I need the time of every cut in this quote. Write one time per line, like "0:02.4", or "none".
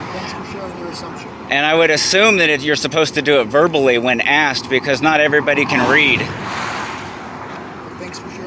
0:07.2